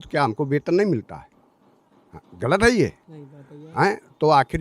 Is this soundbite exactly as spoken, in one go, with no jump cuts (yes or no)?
yes